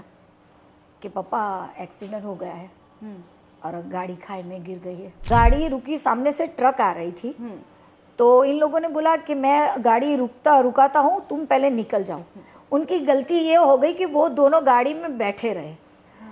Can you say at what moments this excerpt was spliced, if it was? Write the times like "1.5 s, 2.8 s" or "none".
5.2 s